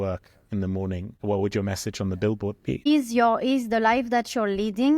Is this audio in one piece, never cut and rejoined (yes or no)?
no